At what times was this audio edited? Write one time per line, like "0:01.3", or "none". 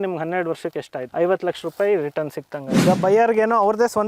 0:01.0
0:02.8